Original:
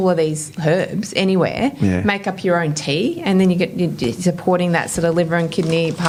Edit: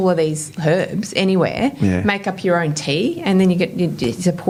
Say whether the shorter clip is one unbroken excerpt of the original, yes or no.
yes